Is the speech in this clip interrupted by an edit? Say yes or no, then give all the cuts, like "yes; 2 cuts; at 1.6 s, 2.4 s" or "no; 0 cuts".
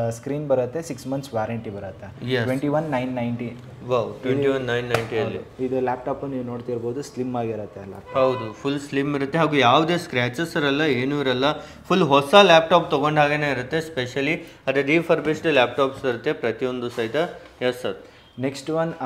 no; 0 cuts